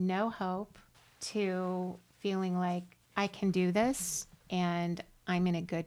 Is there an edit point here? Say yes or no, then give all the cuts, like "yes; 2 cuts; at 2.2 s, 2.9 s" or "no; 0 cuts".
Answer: no; 0 cuts